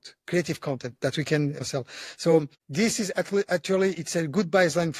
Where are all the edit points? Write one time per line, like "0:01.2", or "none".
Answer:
0:01.6
0:02.6